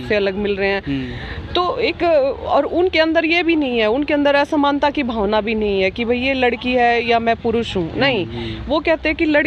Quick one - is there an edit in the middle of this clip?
no; 0 cuts

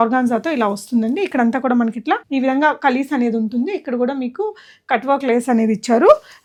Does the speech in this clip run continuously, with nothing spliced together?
yes; 0 cuts

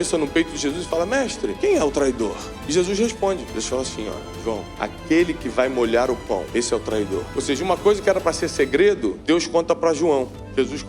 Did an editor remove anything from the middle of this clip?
yes; 7 cuts; at 1.5 s, 2.5 s, 3.5 s, 4.7 s, 6.5 s, 7.3 s, 9.2 s

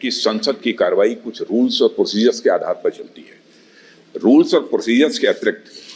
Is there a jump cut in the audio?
no; 0 cuts

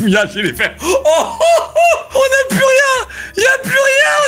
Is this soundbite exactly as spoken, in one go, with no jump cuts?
yes; 0 cuts

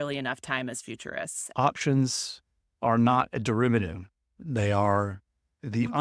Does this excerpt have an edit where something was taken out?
yes; 1 cut; at 1.4 s

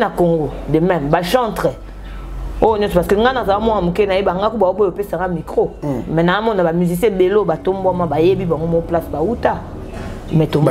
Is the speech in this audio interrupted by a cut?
no; 0 cuts

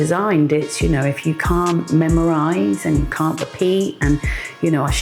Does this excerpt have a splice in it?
no; 0 cuts

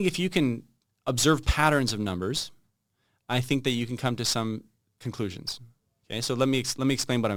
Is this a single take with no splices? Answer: yes; 0 cuts

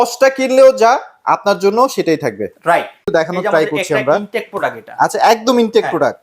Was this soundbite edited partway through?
yes; 1 cut; at 3.1 s

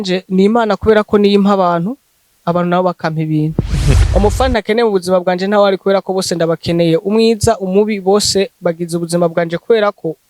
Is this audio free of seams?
no; 1 cut; at 3.9 s

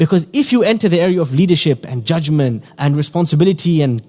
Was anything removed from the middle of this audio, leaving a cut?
yes; 1 cut; at 2.7 s

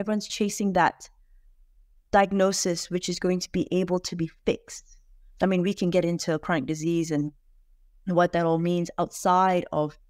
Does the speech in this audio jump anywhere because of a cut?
no; 0 cuts

